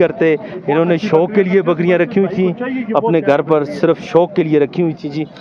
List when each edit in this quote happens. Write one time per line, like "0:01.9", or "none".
none